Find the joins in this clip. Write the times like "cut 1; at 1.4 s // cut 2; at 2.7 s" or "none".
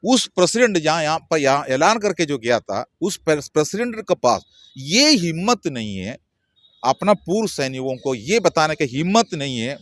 none